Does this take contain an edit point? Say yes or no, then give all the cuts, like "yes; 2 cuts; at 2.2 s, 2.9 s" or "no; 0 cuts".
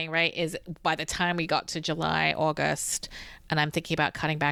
no; 0 cuts